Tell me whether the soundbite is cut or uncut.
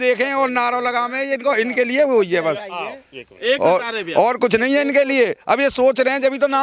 uncut